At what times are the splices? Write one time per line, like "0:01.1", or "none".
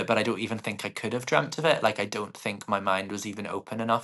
none

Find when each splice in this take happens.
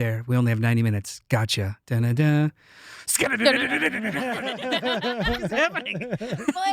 none

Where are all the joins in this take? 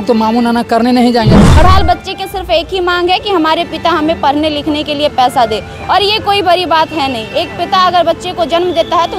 0:01.5

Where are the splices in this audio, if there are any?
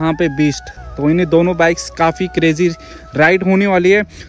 none

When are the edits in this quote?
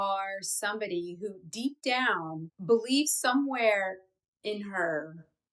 0:02.5

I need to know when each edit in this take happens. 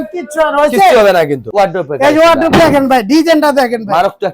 0:01.4

